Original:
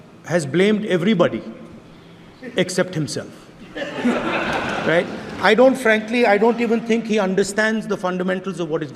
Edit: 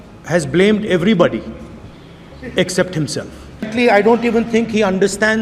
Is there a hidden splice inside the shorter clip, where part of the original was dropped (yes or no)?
yes